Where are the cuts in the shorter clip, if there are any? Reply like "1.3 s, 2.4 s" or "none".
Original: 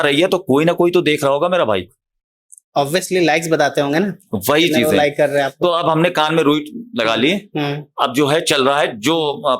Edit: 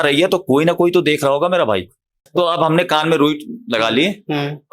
2.3 s

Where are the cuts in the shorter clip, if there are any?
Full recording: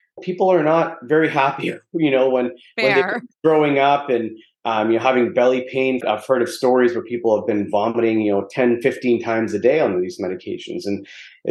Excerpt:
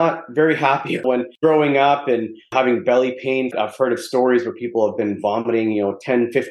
1.1 s, 2.5 s

